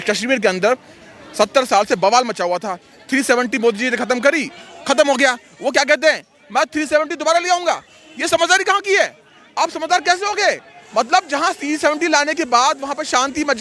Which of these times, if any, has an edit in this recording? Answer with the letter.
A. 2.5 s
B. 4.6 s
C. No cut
C